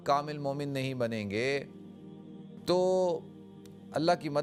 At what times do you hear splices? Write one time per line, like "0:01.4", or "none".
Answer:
none